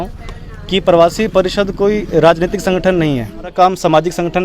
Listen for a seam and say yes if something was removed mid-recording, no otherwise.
yes